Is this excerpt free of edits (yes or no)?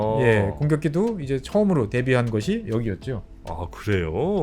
no